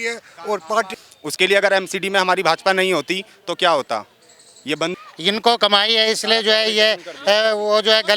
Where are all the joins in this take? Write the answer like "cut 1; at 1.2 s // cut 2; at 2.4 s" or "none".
cut 1; at 1.0 s // cut 2; at 4.9 s